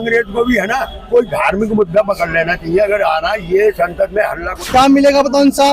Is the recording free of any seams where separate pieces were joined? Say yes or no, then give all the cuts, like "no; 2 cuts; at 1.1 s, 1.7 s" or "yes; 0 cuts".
no; 1 cut; at 4.8 s